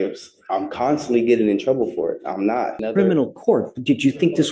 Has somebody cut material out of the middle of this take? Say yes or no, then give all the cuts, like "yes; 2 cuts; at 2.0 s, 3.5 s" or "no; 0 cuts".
yes; 1 cut; at 2.8 s